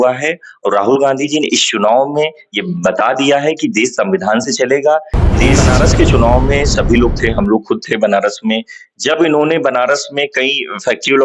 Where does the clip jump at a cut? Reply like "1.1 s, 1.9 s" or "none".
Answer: 5.6 s